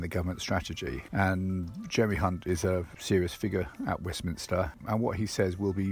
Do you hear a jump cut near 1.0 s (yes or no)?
yes